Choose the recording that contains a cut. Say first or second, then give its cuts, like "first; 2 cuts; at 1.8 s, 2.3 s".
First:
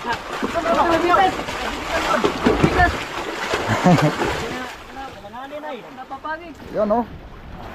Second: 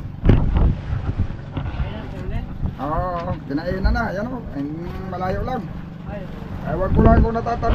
first; 1 cut; at 6.5 s